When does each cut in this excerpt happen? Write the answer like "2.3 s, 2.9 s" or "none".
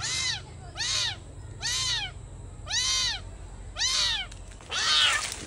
4.5 s

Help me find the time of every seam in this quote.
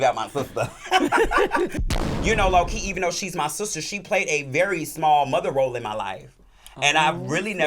1.7 s

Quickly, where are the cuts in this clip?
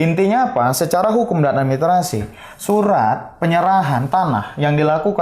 none

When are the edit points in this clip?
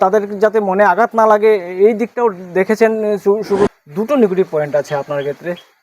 3.7 s

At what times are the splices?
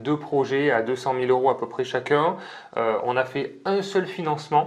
none

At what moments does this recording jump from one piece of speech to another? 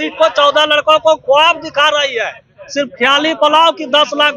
none

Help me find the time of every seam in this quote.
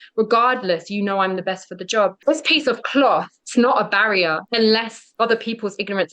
2.2 s, 3.4 s, 4.4 s, 5.0 s

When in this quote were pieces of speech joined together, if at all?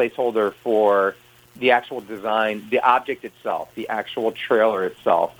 none

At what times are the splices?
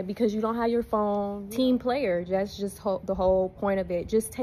1.4 s

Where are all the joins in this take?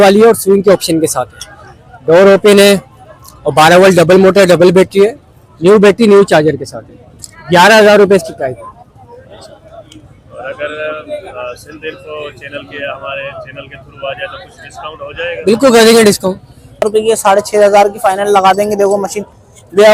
16.8 s

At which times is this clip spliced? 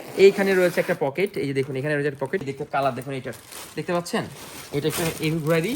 2.5 s

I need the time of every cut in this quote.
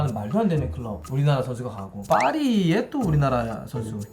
1.9 s

